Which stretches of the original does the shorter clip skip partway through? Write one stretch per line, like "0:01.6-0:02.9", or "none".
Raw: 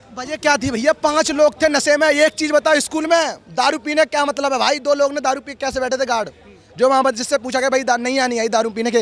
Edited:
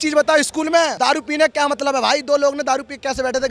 0:03.3-0:03.5